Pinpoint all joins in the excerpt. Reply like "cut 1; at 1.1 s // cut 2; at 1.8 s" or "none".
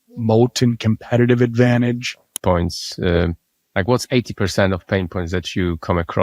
cut 1; at 2.4 s

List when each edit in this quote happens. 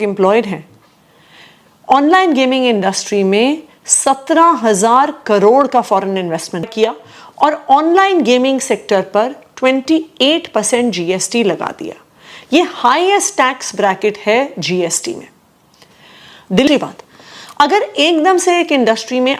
cut 1; at 6.7 s // cut 2; at 16.7 s

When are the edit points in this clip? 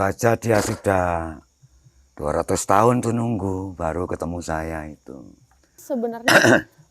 cut 1; at 5.8 s

